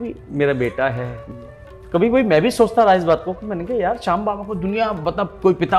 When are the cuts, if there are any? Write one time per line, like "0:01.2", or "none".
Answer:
none